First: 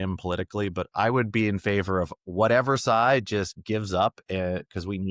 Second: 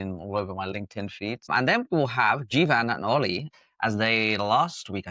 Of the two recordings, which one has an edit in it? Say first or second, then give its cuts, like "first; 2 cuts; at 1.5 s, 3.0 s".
second; 2 cuts; at 1.5 s, 3.5 s